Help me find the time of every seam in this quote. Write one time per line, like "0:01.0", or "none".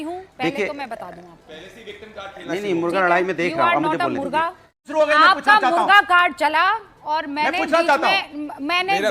0:04.8